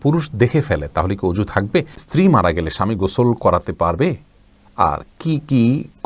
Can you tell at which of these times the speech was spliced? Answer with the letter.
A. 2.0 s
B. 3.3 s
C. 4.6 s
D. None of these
A